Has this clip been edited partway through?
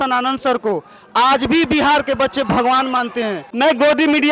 yes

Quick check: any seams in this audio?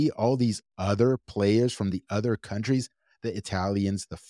no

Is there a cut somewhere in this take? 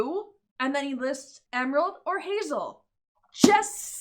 yes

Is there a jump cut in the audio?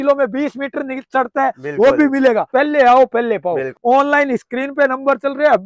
yes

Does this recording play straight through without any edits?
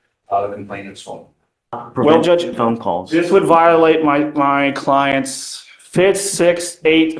no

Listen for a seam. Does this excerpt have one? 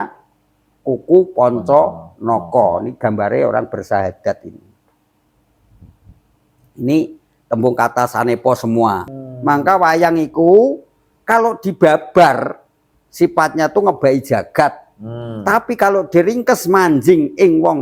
yes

